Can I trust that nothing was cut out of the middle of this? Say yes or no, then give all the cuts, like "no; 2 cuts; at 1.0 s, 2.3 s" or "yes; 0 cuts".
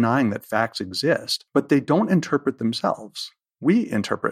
no; 1 cut; at 1.3 s